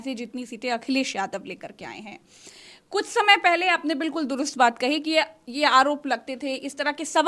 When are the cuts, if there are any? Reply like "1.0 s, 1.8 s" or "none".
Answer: none

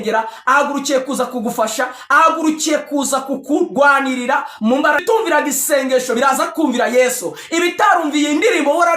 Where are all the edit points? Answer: 5.0 s

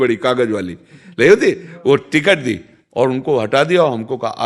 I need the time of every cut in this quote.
none

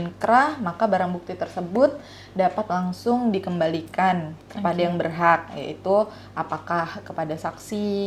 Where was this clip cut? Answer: none

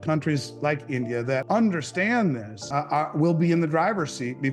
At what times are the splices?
1.4 s, 2.5 s

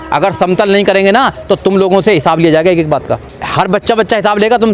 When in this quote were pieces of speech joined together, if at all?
3.4 s

